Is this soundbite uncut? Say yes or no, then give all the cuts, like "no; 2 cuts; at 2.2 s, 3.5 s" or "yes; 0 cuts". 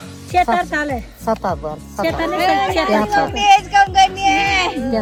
yes; 0 cuts